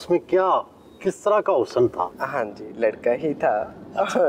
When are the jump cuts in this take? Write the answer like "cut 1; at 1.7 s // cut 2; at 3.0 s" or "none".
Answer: cut 1; at 2.2 s